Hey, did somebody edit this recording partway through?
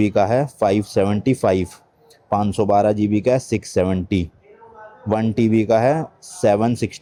no; 0 cuts

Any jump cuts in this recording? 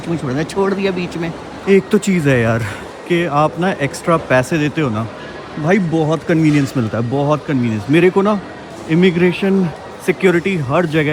no; 0 cuts

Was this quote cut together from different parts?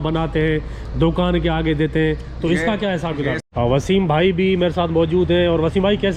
yes; 1 cut; at 3.4 s

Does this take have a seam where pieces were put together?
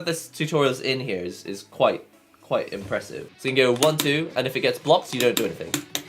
yes; 1 cut; at 3.2 s

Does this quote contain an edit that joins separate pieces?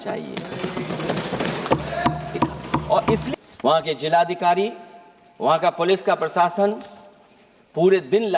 yes; 1 cut; at 3.3 s

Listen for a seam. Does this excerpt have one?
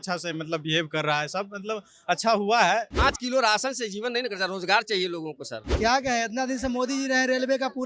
yes; 2 cuts; at 2.9 s, 5.7 s

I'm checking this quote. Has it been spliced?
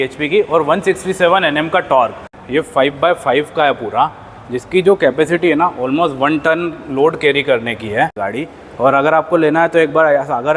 yes; 2 cuts; at 2.3 s, 8.2 s

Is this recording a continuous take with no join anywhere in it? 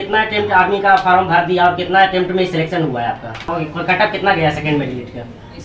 no; 1 cut; at 3.5 s

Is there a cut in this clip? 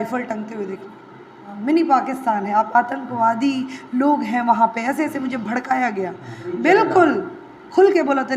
yes; 2 cuts; at 1.5 s, 6.4 s

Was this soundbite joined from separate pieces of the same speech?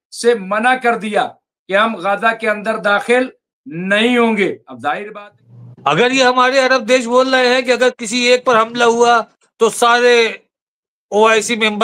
yes; 1 cut; at 5.0 s

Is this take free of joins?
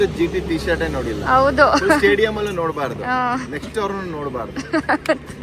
yes; 0 cuts

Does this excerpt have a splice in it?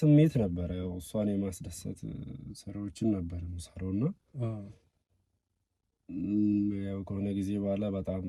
no; 0 cuts

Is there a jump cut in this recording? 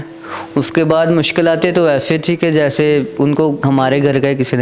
yes; 1 cut; at 3.4 s

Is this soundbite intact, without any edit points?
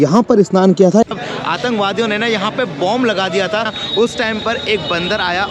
no; 2 cuts; at 1.0 s, 3.7 s

